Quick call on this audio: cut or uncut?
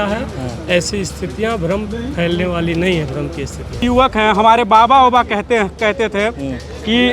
cut